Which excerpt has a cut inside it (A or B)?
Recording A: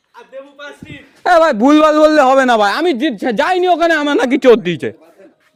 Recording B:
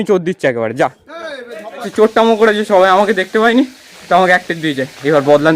B